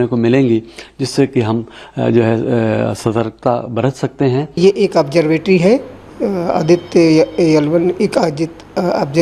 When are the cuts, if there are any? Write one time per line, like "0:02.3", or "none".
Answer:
0:04.6